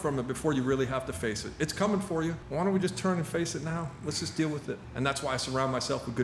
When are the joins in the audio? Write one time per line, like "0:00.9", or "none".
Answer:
0:02.4
0:04.8